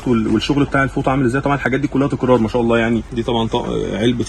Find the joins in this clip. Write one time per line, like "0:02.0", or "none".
0:03.1